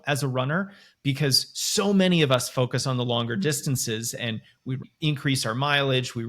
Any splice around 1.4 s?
no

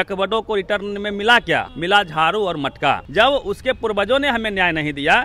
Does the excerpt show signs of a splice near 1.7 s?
yes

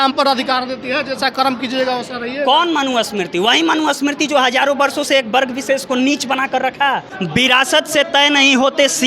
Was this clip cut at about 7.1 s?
yes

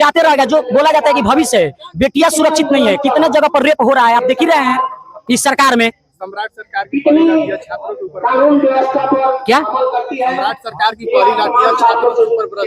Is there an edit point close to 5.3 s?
no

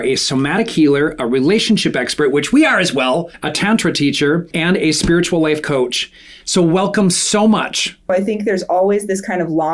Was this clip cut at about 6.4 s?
no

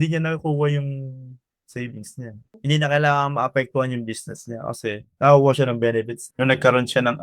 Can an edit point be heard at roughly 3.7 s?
no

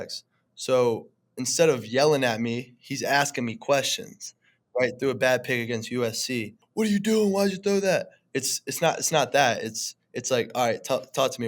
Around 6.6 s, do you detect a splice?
yes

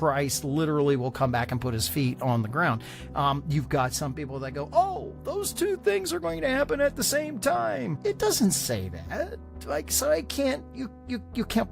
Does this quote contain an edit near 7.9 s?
yes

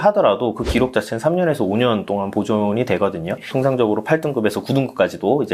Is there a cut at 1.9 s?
no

